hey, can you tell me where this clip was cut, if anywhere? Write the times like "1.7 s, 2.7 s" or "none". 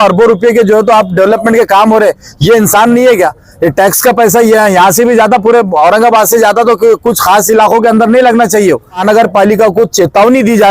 9.0 s